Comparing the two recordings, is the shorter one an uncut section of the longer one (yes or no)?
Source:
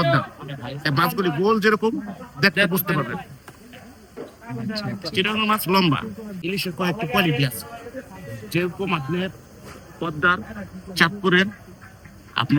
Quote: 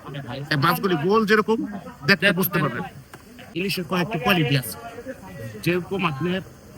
no